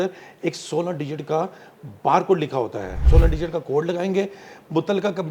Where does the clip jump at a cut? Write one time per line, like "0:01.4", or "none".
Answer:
0:03.0

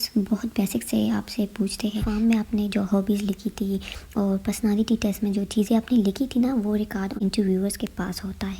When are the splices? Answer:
0:02.0
0:07.2

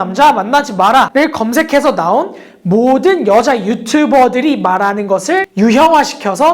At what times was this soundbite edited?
0:01.1
0:05.5

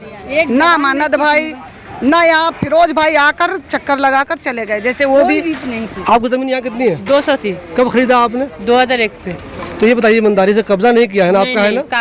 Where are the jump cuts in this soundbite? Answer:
none

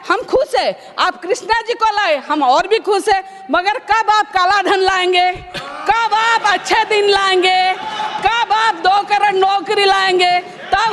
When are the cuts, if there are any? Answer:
none

